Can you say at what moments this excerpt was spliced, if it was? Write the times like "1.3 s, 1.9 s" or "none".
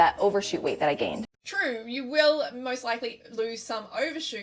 1.2 s